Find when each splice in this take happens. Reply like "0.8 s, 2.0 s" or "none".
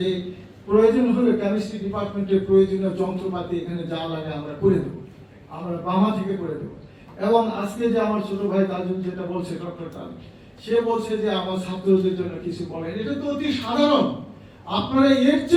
none